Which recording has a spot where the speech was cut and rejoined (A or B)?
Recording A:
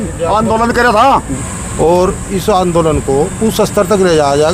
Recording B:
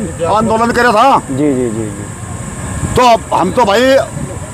A